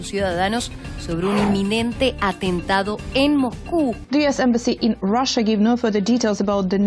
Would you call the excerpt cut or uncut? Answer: cut